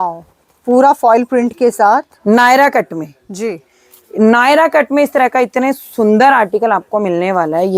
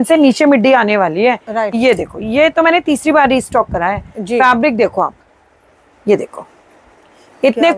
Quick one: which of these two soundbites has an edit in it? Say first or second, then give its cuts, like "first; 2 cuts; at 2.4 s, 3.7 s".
second; 1 cut; at 1.7 s